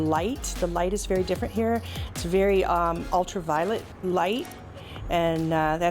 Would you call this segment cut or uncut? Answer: cut